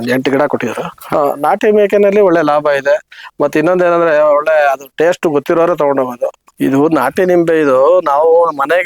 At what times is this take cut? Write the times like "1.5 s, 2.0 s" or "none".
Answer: 0.9 s, 6.5 s